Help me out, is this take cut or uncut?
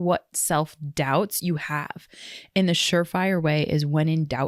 uncut